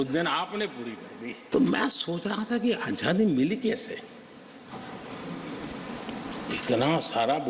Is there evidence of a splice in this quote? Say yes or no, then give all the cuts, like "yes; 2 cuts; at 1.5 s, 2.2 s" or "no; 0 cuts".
yes; 1 cut; at 1.4 s